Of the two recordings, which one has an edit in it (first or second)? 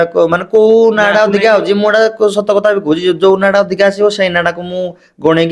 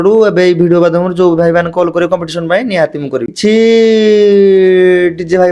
second